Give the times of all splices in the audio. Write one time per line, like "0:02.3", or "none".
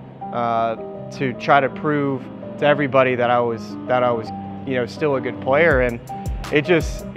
none